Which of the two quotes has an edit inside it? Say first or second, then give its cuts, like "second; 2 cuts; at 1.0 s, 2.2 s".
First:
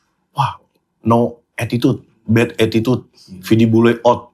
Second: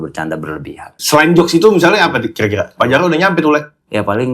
second; 1 cut; at 1.0 s